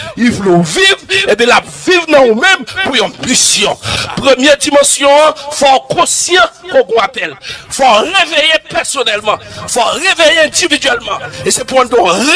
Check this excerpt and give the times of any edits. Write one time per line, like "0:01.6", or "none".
0:03.9